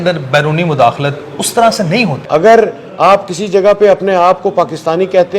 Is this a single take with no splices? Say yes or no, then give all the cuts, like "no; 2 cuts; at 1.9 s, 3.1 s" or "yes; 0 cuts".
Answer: no; 1 cut; at 2.2 s